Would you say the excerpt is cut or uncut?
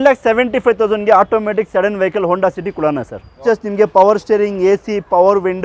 cut